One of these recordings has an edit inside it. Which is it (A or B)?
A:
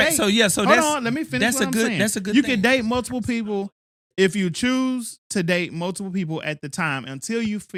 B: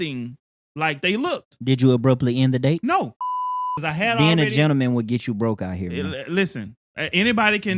B